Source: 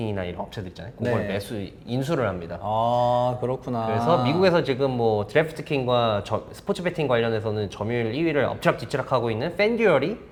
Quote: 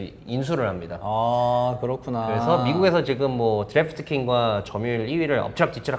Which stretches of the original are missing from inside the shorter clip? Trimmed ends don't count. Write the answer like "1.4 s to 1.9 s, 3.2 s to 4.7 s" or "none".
6.3 s to 7.7 s